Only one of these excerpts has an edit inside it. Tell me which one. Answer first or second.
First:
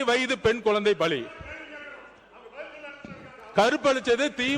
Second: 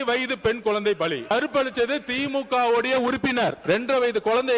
second